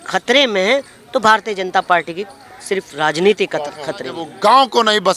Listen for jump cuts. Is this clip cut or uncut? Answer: cut